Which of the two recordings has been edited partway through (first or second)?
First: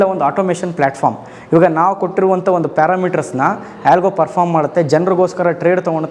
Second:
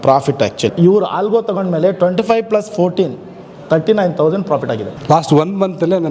second